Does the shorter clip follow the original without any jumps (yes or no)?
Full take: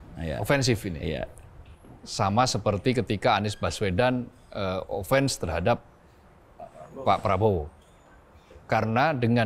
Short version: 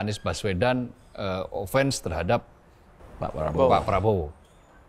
yes